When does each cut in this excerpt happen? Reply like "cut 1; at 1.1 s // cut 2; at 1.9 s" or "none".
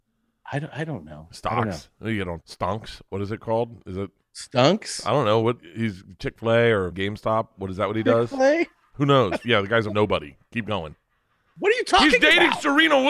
cut 1; at 2.4 s // cut 2; at 5.6 s // cut 3; at 6.9 s // cut 4; at 9.8 s